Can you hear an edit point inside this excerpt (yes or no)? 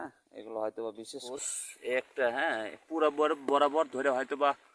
yes